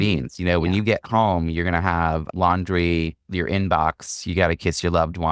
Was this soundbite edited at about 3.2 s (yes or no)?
yes